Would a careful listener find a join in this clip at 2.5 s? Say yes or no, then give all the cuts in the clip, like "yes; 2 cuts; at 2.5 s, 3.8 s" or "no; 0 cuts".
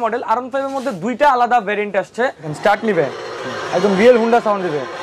yes; 1 cut; at 2.5 s